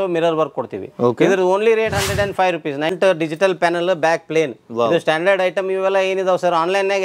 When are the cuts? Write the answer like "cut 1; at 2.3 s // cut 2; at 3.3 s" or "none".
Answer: cut 1; at 2.9 s